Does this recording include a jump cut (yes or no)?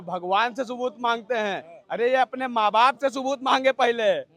no